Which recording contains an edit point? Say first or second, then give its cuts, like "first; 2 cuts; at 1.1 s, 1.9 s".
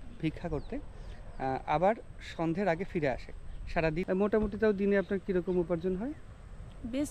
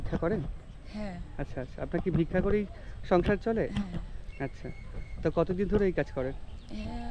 first; 1 cut; at 4.0 s